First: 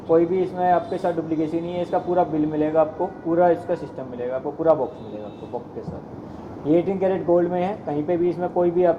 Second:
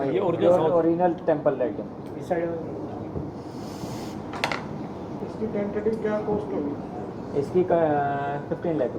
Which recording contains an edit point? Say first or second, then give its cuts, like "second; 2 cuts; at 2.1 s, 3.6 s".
second; 1 cut; at 5.2 s